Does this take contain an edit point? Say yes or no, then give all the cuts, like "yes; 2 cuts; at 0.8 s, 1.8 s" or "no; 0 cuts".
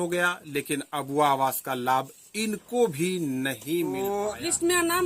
yes; 1 cut; at 4.0 s